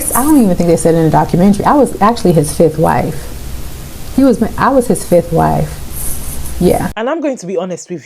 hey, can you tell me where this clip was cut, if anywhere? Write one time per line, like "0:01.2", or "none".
0:06.9